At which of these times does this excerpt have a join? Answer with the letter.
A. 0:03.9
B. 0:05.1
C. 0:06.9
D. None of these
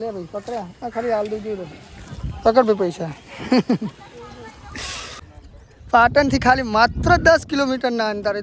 B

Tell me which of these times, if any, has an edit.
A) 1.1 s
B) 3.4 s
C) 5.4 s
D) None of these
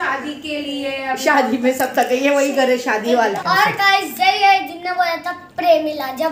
B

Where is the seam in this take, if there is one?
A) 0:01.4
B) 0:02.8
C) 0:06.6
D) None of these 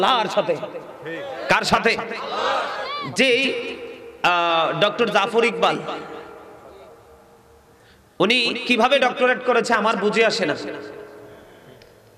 B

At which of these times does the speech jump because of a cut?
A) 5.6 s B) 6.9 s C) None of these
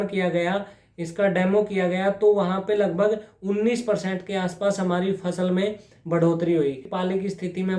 B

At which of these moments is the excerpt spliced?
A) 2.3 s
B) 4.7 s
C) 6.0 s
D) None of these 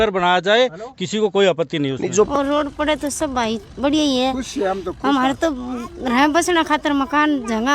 A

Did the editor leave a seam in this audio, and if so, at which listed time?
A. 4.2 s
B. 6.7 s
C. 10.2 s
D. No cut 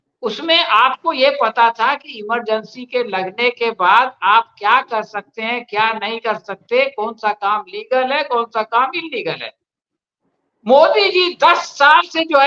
D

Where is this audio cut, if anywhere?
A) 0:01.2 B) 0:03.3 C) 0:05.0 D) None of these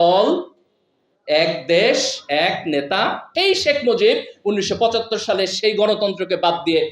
B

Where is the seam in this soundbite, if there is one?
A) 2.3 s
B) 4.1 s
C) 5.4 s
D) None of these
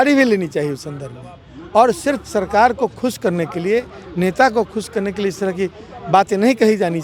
D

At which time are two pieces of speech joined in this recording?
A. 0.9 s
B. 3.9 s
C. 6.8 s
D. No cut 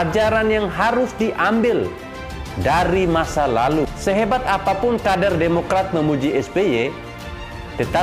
B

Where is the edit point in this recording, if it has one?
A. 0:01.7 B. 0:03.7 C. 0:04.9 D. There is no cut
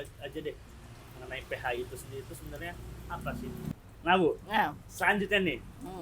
B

